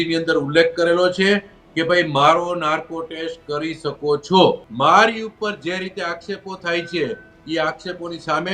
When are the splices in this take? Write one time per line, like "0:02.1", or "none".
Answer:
0:04.7

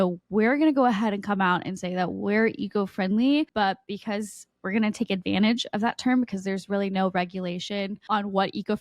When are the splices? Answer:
0:03.5
0:08.0

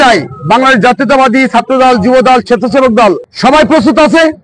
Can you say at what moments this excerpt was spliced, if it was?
0:03.3

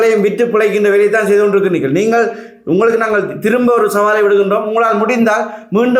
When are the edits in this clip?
none

